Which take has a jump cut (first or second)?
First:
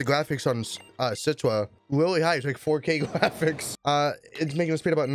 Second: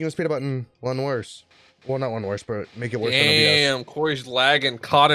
first